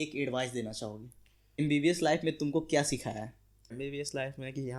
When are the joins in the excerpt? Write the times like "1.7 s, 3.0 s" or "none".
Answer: 1.6 s, 3.7 s